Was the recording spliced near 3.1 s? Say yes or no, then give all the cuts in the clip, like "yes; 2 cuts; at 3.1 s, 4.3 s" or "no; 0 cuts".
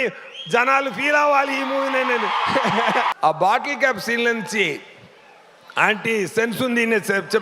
yes; 1 cut; at 3.1 s